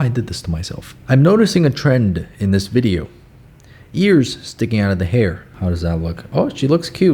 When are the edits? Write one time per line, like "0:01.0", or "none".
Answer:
0:00.9
0:05.5